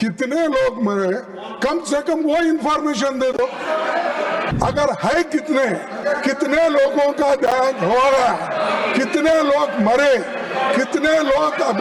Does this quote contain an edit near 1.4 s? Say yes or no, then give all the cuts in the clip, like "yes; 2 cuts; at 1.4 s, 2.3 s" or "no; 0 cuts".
no; 1 cut; at 4.5 s